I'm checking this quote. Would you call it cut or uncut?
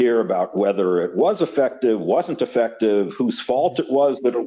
uncut